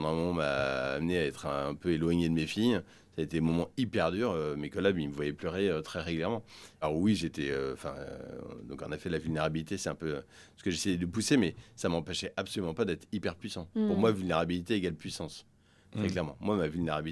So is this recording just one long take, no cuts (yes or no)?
yes